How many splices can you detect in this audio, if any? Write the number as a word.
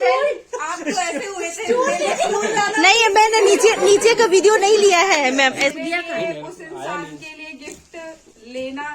one